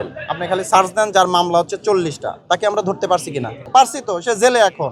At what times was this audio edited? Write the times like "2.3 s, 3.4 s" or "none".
none

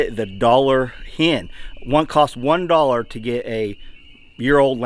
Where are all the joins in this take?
none

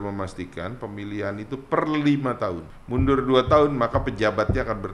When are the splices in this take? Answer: 2.7 s

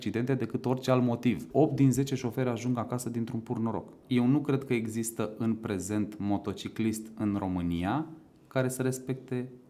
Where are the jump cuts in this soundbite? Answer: 1.5 s, 3.9 s

